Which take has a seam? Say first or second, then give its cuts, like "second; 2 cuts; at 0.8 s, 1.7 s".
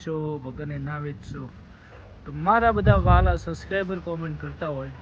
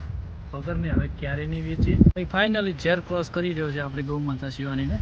second; 1 cut; at 2.2 s